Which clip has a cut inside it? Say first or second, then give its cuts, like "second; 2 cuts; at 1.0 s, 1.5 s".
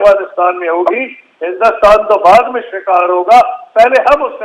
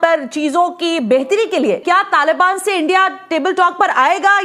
second; 1 cut; at 1.8 s